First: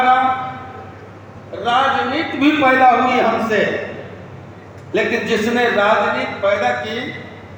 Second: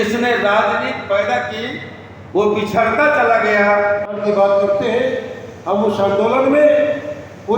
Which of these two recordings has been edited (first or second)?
second